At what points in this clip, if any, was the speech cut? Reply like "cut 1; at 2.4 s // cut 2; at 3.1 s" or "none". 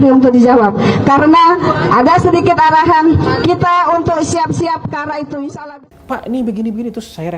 cut 1; at 5.6 s